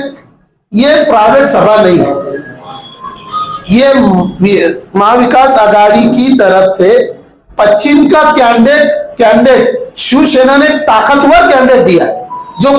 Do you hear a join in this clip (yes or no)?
no